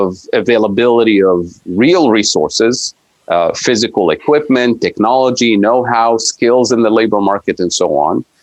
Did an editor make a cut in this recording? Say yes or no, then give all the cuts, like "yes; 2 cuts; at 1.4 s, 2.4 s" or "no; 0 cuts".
no; 0 cuts